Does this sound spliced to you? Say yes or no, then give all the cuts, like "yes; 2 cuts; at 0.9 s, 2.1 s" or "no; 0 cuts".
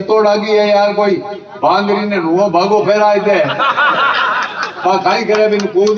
no; 0 cuts